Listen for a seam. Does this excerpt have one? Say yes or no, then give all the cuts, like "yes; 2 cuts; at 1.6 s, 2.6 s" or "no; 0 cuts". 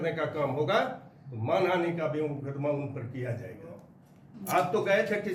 yes; 1 cut; at 3.8 s